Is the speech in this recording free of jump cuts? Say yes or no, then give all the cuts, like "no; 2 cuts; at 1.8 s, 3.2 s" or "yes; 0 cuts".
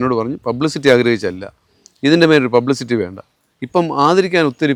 yes; 0 cuts